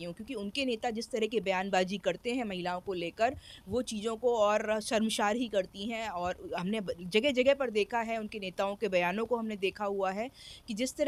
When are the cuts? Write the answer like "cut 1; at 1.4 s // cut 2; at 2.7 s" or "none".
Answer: none